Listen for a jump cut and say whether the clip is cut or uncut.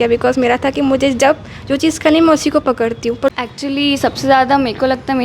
cut